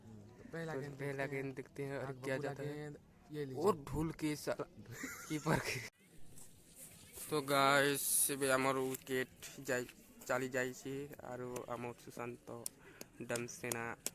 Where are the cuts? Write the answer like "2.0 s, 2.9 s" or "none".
5.8 s